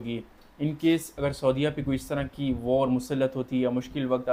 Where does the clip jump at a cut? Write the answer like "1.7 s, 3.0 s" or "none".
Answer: none